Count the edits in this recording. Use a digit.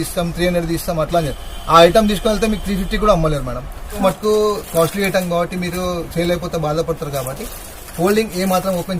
1